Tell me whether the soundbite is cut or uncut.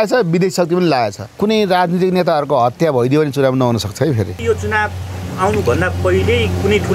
cut